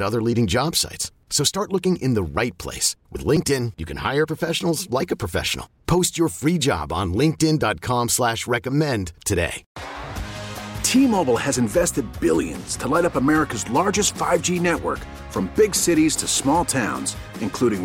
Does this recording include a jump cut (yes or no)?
yes